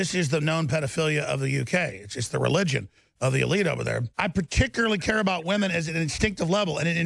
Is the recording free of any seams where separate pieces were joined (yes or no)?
no